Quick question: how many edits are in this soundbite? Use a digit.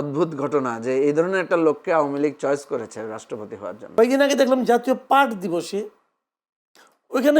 1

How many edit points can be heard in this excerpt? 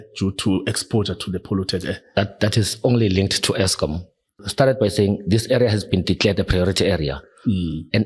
1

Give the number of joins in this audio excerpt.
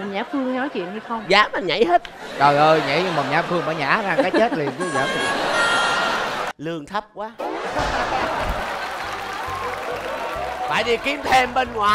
1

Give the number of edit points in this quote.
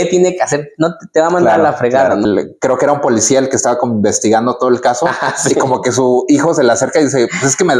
1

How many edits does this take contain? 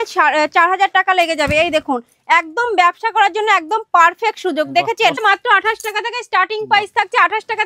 1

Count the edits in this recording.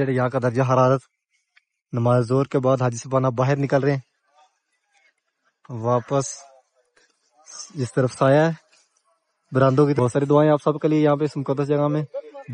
1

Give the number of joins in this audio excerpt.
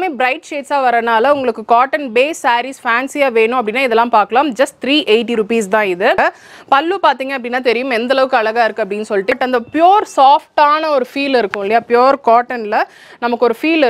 2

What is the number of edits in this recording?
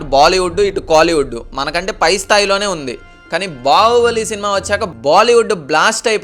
0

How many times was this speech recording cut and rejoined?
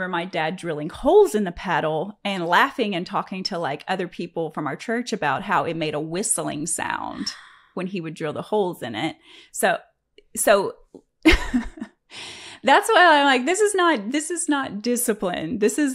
0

